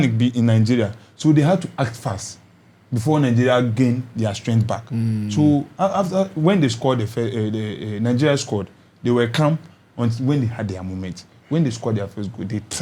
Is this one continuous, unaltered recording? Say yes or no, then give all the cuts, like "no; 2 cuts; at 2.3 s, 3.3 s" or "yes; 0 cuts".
yes; 0 cuts